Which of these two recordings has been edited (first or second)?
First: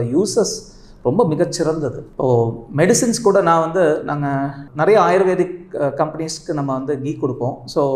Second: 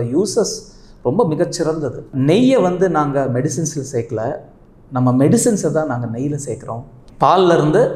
second